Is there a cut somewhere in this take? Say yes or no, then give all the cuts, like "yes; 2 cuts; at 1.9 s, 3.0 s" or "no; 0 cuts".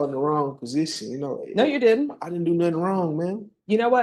no; 0 cuts